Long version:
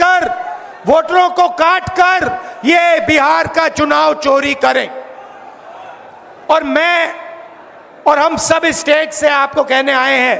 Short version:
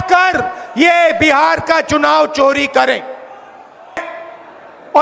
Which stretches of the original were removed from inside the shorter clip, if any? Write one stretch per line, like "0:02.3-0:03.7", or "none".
0:05.9-0:07.2

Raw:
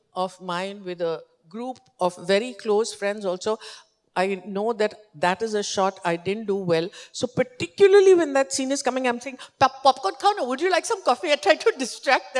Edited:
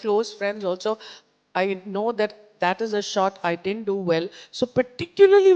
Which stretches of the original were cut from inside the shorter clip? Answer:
none

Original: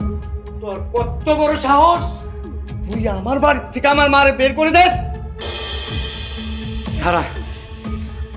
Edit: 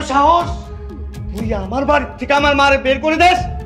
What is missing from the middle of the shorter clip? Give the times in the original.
none

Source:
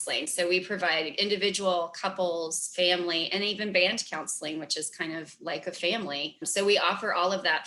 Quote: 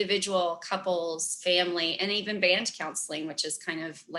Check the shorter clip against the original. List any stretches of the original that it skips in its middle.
none

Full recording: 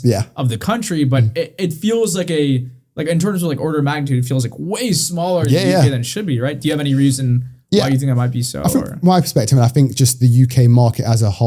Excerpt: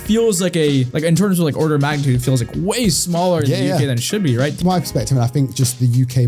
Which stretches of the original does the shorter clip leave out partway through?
0:02.7-0:02.9
0:06.6-0:09.0

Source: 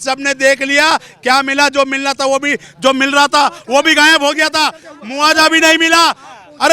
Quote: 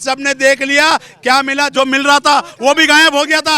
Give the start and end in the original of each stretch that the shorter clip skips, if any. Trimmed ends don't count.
0:01.7-0:02.7

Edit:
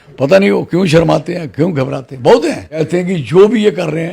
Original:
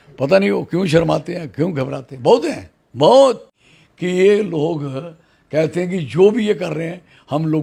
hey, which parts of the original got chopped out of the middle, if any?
0:02.8-0:05.7

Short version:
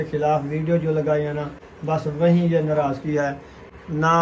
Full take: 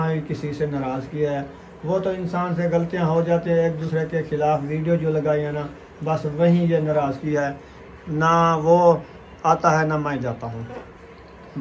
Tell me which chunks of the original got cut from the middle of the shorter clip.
none

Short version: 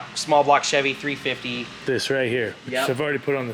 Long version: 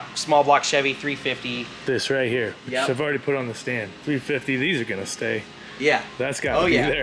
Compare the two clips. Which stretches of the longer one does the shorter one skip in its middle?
none

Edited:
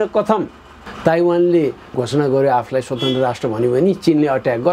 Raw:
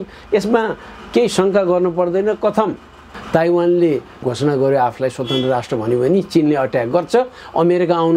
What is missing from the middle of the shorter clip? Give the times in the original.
none

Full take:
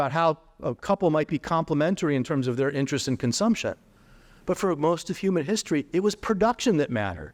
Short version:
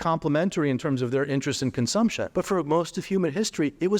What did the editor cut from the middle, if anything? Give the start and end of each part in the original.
0:03.7-0:04.4

